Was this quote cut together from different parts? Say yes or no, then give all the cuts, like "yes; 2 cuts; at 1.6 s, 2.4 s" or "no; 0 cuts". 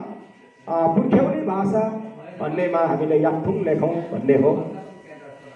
no; 0 cuts